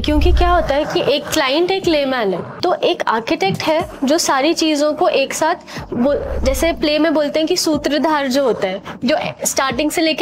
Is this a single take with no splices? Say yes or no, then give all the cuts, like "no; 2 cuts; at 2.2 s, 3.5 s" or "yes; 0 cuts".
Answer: no; 1 cut; at 2.5 s